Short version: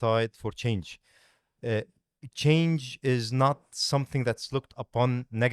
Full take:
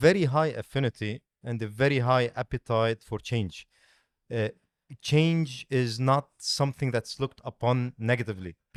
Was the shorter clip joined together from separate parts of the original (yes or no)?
no